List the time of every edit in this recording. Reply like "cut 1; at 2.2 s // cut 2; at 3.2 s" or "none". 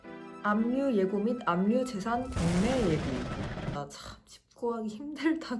cut 1; at 3.8 s

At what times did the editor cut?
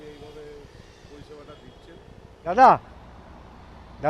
cut 1; at 2.5 s

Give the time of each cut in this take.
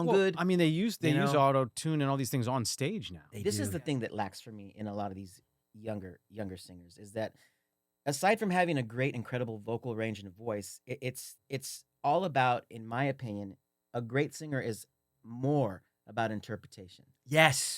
cut 1; at 3.3 s // cut 2; at 11.3 s

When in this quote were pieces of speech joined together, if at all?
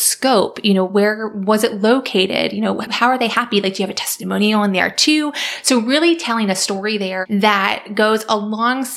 cut 1; at 7.2 s

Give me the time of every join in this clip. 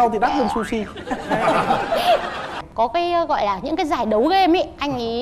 cut 1; at 2.6 s

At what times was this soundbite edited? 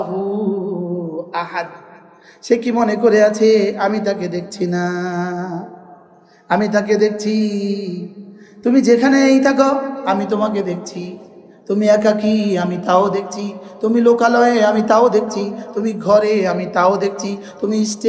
none

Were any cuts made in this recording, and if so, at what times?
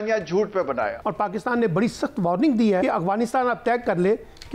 cut 1; at 1.0 s // cut 2; at 2.8 s

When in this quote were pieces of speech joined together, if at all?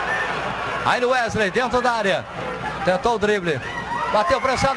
none

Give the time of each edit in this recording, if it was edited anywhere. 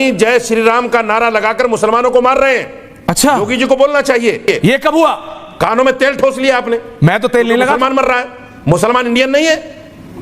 cut 1; at 4.4 s

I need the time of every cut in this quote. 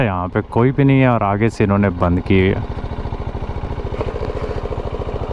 none

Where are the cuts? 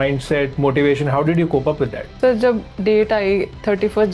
cut 1; at 2.2 s

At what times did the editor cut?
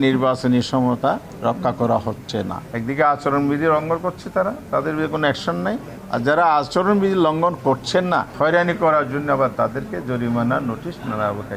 cut 1; at 1.3 s // cut 2; at 2.6 s // cut 3; at 5.9 s // cut 4; at 8.3 s

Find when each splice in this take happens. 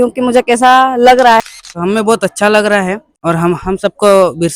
cut 1; at 1.4 s // cut 2; at 3.1 s

